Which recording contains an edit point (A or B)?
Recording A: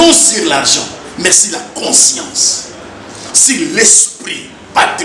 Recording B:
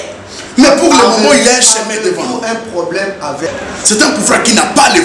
B